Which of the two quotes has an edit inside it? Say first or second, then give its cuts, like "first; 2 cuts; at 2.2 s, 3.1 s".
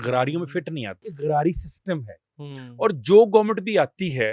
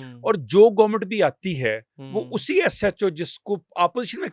first; 1 cut; at 1.0 s